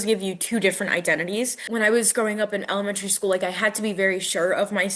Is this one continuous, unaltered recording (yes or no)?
no